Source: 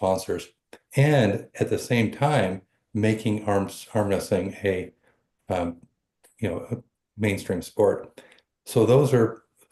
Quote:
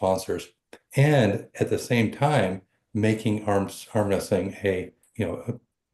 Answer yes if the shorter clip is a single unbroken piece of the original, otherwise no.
no